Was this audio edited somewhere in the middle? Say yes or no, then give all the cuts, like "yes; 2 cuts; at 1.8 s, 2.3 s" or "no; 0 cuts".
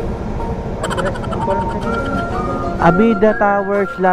no; 0 cuts